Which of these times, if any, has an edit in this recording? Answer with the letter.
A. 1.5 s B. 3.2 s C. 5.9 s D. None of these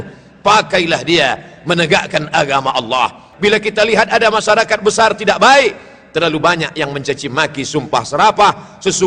B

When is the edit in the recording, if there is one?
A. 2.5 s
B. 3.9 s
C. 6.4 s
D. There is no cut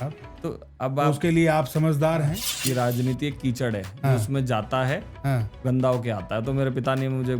A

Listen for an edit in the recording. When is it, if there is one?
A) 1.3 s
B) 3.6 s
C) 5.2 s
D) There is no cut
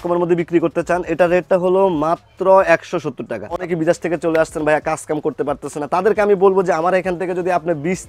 B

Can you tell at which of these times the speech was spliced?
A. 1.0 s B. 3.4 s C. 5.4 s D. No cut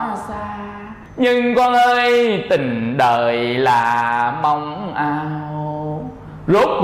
A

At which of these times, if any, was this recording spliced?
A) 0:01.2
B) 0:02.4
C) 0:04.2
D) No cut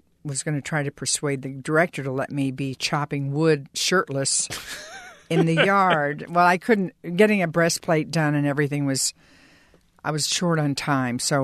D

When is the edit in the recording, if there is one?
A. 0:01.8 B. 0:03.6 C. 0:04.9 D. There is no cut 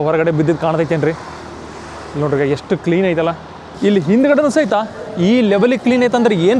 B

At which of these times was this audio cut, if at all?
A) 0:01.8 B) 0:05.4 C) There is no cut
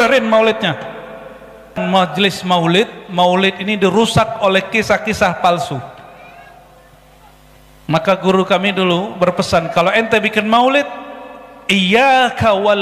A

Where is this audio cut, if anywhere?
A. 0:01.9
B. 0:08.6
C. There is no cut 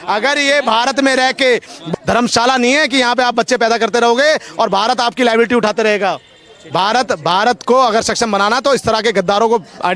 A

